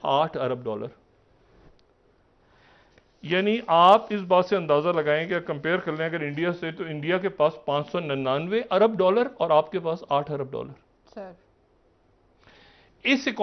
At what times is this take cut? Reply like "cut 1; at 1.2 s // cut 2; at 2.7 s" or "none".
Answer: none